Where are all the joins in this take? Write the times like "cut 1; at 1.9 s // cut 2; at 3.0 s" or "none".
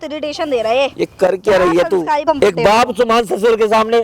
cut 1; at 2.2 s